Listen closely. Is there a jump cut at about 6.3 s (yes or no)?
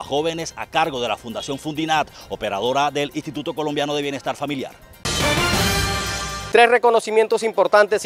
yes